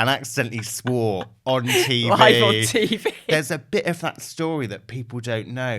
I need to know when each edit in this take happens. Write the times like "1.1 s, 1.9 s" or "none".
3.3 s